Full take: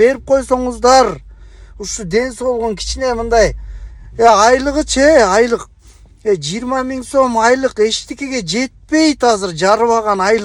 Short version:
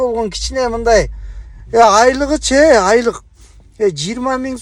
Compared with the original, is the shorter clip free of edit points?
yes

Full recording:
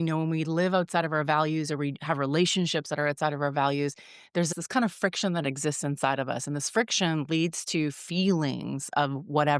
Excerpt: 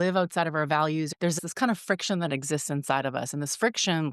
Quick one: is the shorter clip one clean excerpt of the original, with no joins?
no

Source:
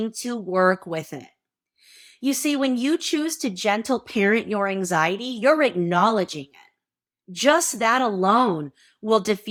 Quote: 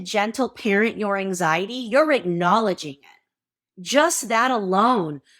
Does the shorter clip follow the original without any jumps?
yes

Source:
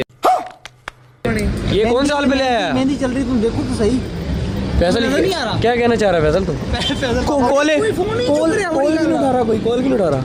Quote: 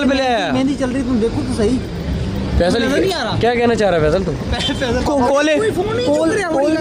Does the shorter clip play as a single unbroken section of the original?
yes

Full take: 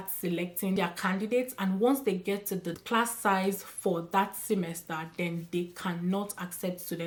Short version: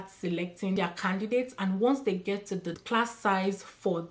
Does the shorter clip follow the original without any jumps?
yes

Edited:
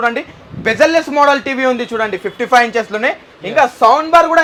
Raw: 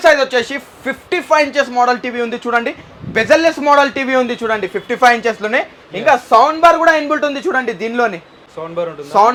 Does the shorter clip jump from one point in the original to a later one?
no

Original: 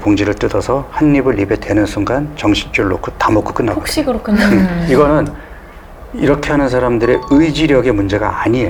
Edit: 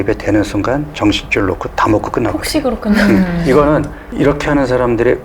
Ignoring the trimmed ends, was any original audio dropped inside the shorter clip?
yes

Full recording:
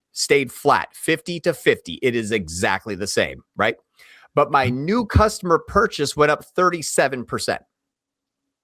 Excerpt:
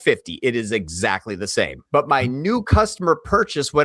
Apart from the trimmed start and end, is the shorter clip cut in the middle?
yes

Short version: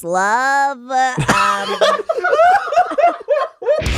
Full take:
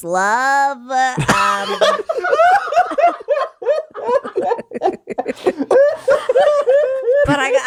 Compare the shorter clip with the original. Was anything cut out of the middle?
no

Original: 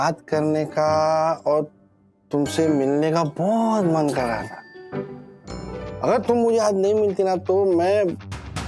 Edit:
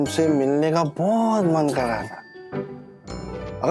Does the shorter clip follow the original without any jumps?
yes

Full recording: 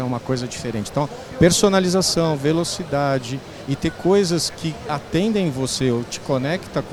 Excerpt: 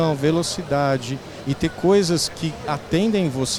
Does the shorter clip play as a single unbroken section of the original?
yes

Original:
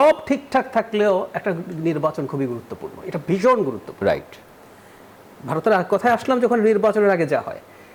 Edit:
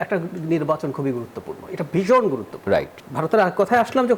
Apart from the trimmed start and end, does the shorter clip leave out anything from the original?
yes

